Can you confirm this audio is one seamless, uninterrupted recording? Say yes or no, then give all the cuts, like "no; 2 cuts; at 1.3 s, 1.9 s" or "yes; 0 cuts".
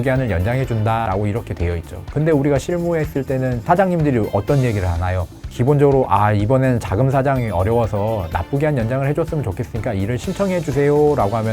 no; 2 cuts; at 1.1 s, 3.6 s